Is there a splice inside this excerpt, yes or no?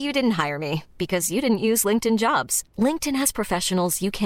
no